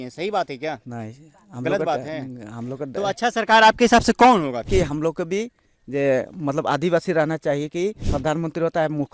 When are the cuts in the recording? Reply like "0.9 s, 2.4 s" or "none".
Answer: 4.7 s, 8.1 s